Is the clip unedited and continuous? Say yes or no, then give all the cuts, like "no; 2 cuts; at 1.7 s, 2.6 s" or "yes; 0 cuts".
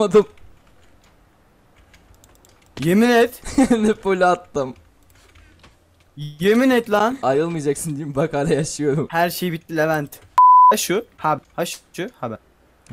no; 2 cuts; at 10.2 s, 10.7 s